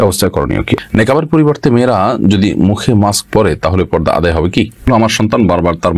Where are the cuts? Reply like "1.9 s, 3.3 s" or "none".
0.8 s, 4.8 s

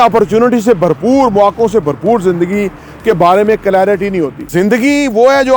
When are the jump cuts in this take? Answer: 4.4 s

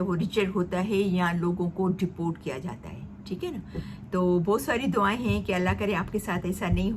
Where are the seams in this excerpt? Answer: none

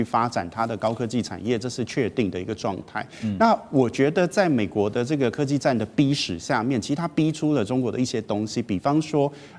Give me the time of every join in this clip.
none

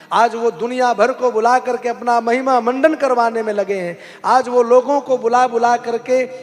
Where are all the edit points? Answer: none

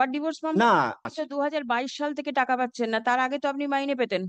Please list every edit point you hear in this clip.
1.1 s

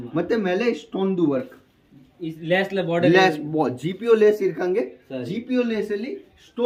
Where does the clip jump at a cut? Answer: none

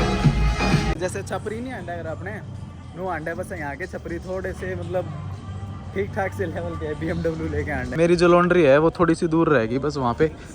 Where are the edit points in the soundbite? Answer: 0.9 s, 7.8 s

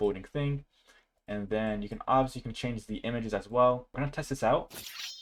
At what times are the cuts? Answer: 4.0 s

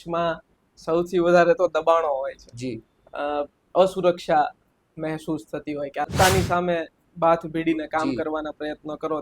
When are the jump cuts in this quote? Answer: 6.1 s

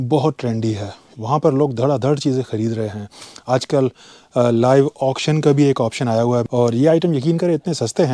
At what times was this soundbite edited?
none

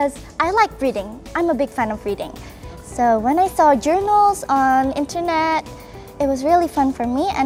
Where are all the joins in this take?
none

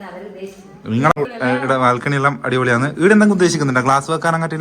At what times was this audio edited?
1.3 s

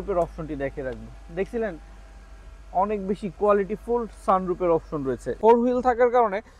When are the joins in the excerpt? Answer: 5.3 s

